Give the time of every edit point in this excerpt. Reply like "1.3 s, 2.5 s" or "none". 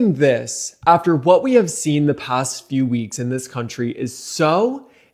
none